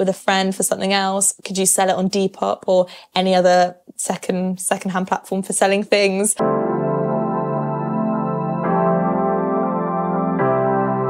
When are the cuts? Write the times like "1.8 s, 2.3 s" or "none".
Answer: 6.3 s